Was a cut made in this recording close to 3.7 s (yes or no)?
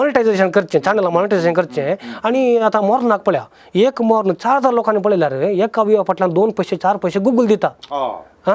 no